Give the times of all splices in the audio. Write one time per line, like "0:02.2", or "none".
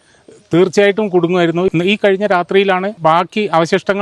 0:01.7
0:02.9